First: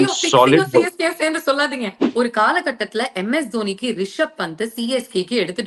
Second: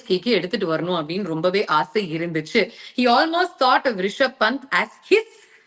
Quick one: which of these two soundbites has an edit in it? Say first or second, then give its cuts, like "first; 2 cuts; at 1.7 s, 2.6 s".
first; 1 cut; at 2.0 s